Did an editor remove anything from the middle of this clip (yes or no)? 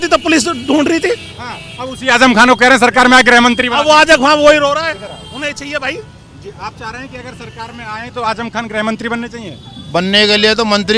no